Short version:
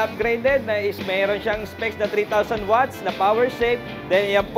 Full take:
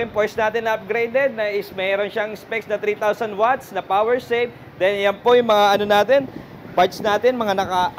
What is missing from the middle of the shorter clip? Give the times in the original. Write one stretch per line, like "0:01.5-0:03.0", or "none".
none